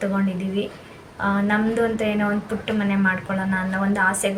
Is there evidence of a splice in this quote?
no; 0 cuts

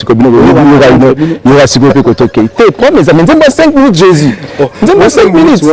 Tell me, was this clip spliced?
no; 0 cuts

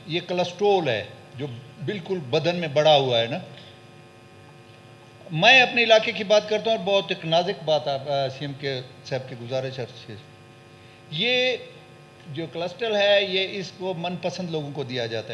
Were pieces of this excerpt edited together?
no; 0 cuts

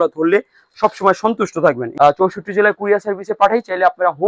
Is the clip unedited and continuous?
no; 1 cut; at 1.9 s

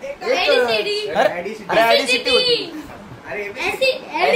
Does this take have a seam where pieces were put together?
no; 0 cuts

